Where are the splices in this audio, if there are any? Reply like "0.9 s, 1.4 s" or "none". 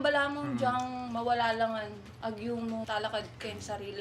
1.0 s, 2.0 s, 2.9 s